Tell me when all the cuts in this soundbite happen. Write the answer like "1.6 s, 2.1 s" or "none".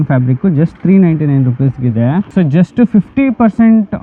2.3 s